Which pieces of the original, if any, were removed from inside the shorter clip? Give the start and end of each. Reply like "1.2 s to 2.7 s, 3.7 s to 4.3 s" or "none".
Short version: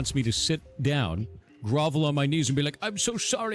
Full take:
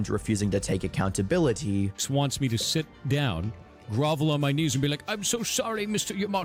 none